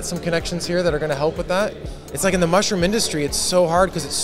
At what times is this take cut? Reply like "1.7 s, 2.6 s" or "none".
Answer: 1.8 s

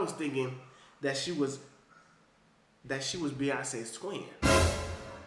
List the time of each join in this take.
4.3 s

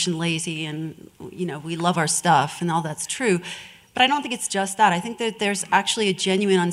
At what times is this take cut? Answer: 2.6 s

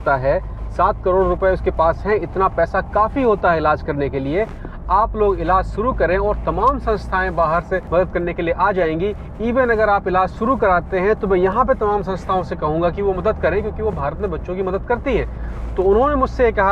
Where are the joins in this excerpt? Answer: none

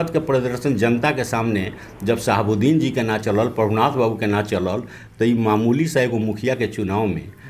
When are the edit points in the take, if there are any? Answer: none

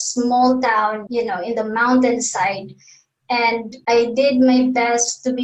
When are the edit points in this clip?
1.0 s, 3.7 s

